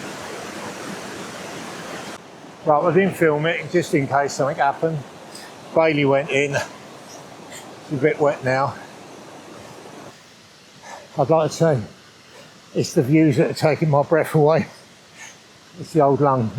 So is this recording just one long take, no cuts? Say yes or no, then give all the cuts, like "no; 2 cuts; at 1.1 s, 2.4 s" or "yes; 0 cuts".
no; 2 cuts; at 2.2 s, 10.1 s